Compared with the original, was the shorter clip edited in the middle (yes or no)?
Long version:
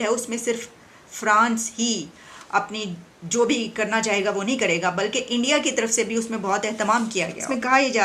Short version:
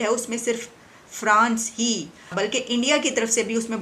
yes